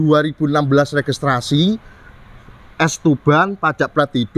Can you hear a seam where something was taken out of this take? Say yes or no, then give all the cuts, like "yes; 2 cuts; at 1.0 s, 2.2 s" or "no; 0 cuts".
no; 0 cuts